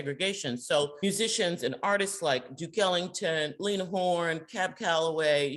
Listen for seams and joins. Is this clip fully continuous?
no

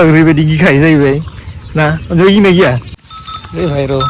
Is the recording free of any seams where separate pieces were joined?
no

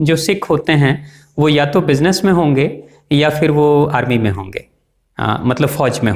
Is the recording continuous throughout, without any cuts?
yes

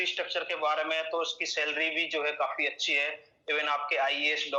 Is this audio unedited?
yes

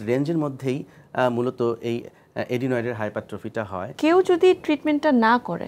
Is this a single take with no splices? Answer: no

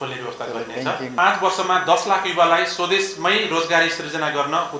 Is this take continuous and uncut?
no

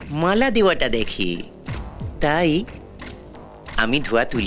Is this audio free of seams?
yes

